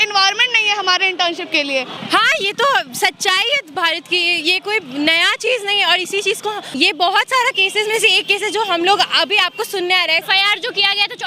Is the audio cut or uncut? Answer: cut